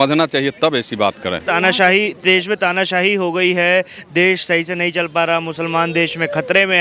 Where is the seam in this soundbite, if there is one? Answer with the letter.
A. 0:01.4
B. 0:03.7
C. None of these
A